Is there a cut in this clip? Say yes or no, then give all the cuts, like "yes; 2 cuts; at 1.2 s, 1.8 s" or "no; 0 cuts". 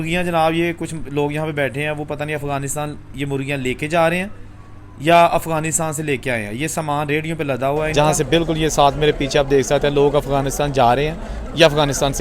yes; 1 cut; at 7.9 s